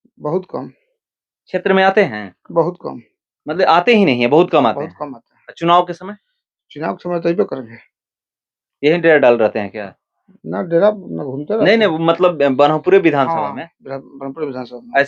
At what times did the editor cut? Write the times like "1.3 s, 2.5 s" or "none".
none